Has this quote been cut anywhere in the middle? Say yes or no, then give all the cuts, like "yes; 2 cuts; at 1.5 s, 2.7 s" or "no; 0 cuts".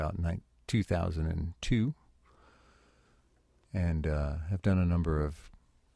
yes; 1 cut; at 3.0 s